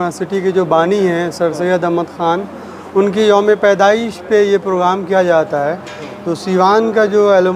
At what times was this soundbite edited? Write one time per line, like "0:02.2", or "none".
none

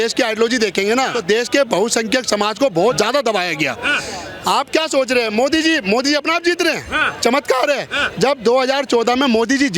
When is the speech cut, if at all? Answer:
0:01.2
0:02.9

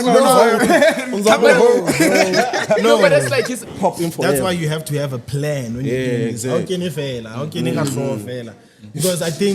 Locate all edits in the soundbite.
0:03.8

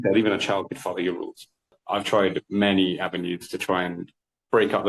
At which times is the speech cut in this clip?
0:01.8

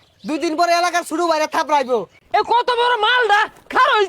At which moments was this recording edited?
0:02.2

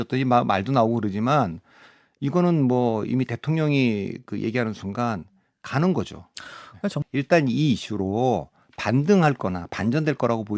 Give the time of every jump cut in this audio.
0:07.0

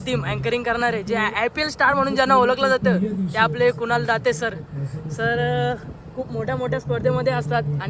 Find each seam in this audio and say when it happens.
none

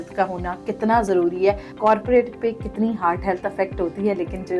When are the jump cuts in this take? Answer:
0:01.7

